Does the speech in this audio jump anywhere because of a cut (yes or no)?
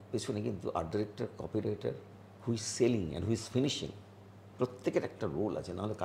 no